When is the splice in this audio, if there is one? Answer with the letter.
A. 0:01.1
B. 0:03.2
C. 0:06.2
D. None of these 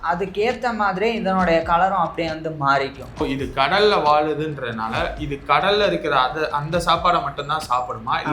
B